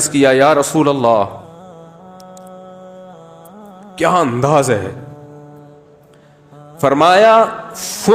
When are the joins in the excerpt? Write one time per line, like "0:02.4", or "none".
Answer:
0:01.4
0:04.0
0:05.0
0:06.8